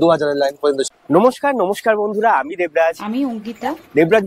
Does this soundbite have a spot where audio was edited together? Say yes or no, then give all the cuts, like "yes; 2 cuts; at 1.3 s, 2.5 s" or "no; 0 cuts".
yes; 1 cut; at 0.9 s